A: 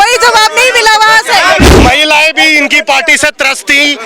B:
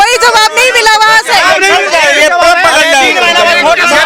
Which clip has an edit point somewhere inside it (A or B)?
A